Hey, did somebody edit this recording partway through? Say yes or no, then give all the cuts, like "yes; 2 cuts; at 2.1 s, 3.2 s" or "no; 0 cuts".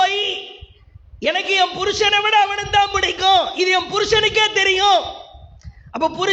no; 0 cuts